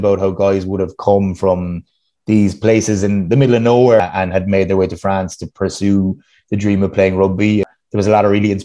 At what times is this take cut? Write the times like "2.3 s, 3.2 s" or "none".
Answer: 4.0 s, 7.7 s